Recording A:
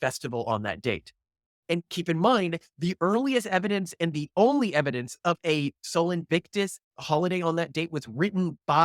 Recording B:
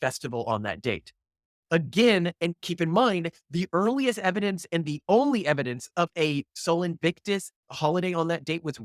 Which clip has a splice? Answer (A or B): A